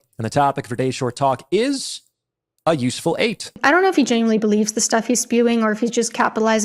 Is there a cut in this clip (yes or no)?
yes